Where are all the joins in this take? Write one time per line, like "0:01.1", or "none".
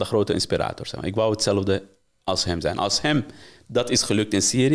none

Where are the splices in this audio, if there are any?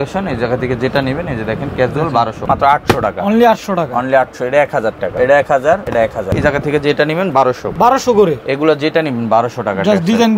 0:02.4
0:05.1
0:06.2
0:07.7

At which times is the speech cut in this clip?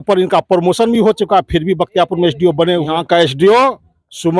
0:02.9

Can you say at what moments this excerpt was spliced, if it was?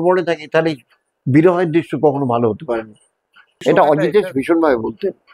0:03.6

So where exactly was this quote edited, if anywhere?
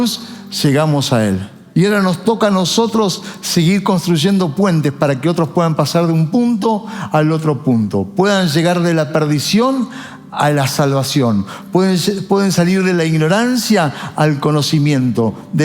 0:01.5

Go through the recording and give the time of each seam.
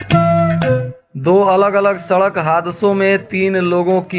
0:01.0

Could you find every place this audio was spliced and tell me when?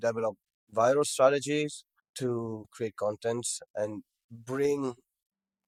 none

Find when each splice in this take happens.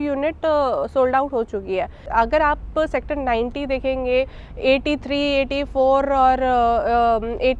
0:02.1

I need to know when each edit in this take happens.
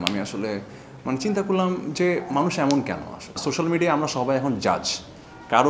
0:03.4

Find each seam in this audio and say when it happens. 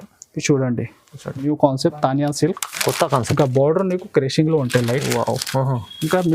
0:01.4

